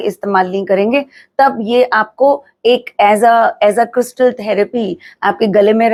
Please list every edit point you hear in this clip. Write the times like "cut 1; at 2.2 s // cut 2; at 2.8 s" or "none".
none